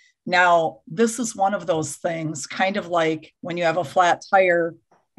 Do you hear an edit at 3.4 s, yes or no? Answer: yes